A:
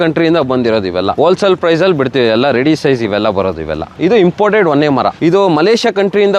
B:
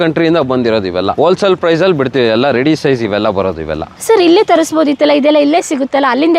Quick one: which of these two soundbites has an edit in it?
A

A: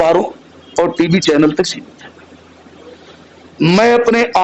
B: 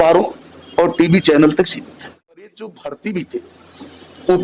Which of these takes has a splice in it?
B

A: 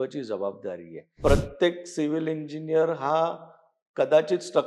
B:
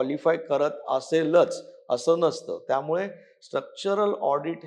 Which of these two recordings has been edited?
A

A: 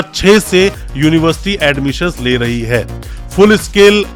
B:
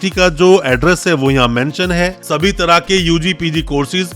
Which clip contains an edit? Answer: B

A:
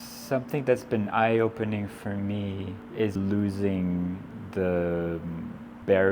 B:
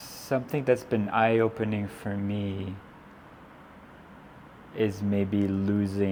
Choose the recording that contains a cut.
A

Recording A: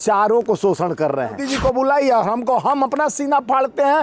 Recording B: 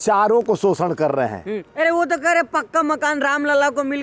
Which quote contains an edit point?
A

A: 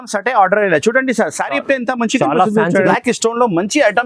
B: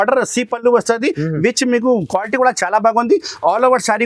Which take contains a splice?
A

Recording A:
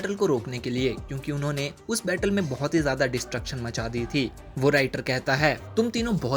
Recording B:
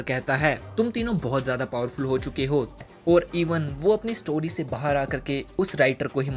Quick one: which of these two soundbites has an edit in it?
B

